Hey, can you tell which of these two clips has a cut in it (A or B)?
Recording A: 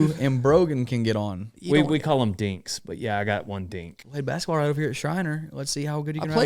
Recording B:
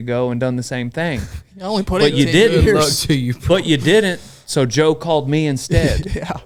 A